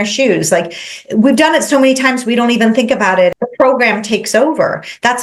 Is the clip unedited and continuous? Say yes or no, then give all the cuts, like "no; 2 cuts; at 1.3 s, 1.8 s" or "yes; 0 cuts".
no; 1 cut; at 3.3 s